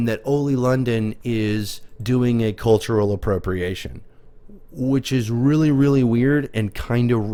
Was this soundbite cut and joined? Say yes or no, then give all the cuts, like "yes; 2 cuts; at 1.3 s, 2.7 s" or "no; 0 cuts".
no; 0 cuts